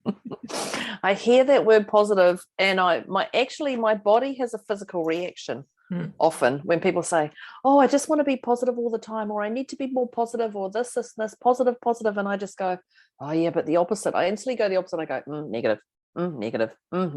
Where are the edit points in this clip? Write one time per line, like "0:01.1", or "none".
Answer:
0:16.0

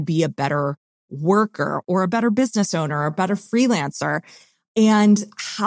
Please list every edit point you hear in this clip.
0:04.6

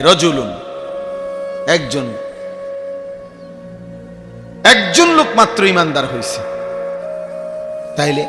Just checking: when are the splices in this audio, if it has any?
0:02.2
0:04.6

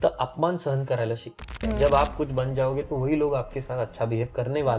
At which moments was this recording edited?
0:01.6

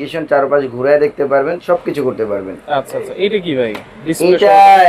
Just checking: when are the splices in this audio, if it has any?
none

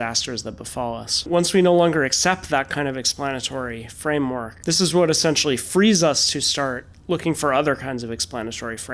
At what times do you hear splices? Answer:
0:01.3
0:04.5

